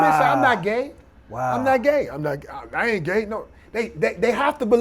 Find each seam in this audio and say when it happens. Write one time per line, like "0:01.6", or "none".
none

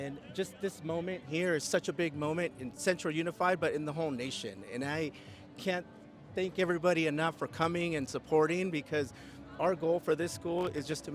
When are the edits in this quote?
none

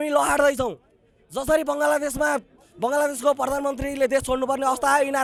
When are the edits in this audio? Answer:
none

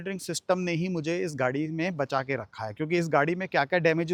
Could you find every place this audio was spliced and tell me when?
none

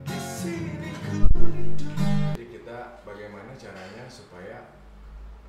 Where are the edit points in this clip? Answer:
0:02.4

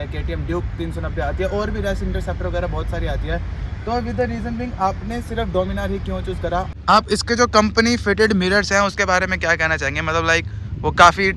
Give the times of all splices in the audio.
0:06.7

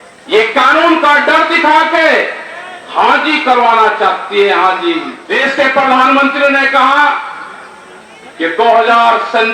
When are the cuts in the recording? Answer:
0:05.2

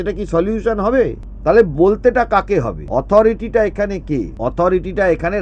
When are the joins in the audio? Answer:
0:01.3
0:02.8
0:04.3

